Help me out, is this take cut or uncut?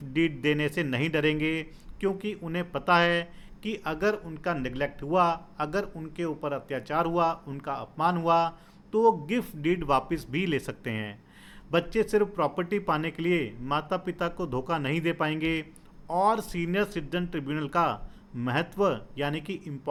uncut